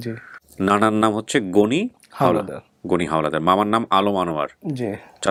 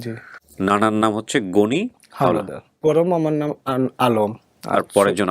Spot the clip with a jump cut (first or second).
second